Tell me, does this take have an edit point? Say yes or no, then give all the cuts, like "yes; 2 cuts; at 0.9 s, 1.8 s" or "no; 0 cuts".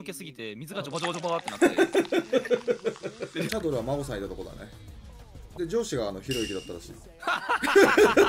yes; 2 cuts; at 3.5 s, 5.4 s